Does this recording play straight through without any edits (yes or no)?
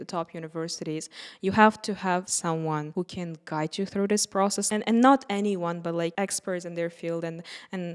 no